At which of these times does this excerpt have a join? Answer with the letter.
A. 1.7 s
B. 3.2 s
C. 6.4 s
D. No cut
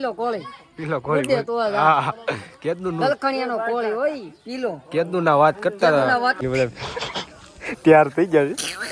C